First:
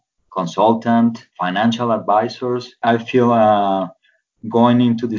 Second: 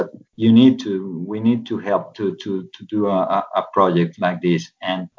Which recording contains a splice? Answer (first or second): first